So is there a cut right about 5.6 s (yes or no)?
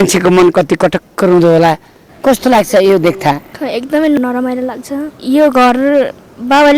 no